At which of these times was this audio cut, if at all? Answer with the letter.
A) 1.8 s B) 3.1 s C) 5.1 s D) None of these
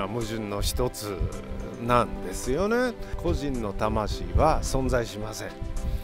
B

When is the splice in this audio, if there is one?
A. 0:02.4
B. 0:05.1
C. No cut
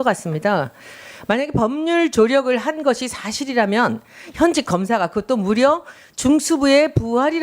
B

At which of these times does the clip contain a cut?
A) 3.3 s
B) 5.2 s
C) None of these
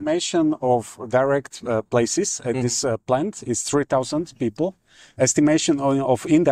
C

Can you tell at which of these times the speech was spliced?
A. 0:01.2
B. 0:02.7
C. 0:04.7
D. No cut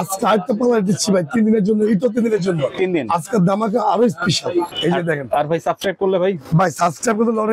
C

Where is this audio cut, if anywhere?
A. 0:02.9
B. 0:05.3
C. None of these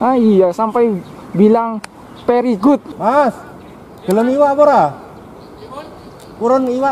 A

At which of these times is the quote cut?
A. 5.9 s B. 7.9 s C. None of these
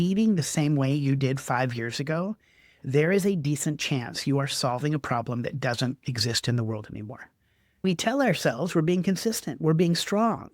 B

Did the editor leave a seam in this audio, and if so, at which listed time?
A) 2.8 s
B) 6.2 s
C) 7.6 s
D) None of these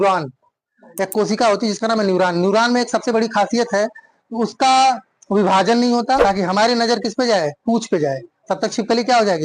B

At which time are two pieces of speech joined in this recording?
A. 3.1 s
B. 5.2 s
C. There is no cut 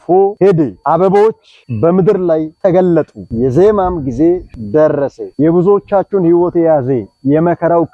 B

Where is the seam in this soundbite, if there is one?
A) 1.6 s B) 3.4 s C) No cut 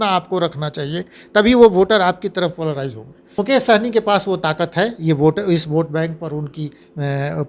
B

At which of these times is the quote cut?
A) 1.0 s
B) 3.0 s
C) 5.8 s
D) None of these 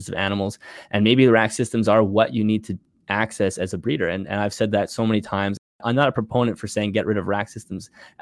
C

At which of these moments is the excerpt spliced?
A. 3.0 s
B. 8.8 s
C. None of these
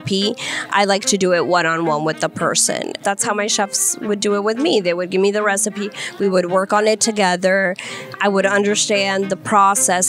A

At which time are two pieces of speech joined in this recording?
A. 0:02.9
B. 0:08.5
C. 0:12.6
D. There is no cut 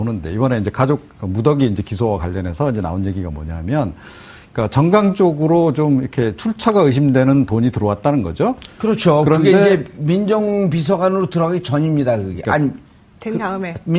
A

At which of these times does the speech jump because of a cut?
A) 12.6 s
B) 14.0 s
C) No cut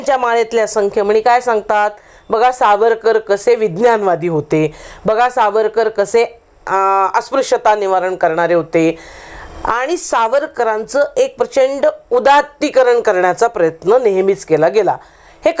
C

